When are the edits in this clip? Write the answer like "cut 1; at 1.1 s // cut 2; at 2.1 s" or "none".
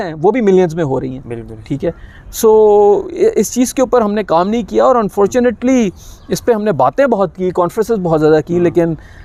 none